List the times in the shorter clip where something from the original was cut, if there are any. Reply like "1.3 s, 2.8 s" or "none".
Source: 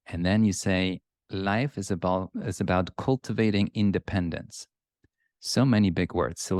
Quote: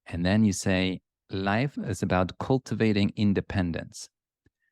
1.7 s